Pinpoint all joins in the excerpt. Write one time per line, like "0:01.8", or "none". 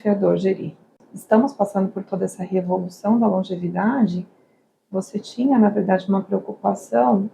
0:01.0

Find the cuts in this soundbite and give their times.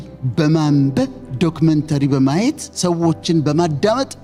none

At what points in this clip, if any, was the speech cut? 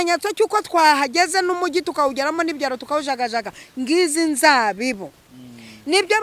none

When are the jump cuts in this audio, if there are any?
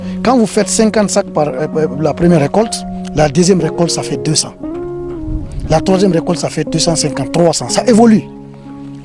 none

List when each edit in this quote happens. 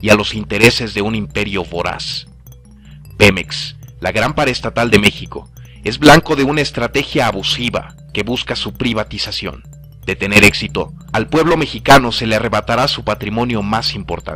0:04.1

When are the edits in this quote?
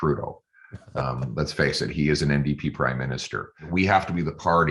0:03.7

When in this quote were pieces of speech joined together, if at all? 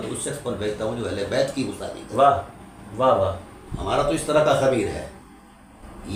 none

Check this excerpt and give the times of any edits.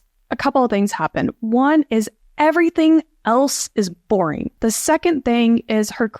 0:04.5

